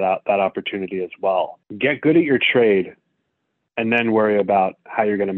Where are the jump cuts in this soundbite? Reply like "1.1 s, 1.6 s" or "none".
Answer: 1.6 s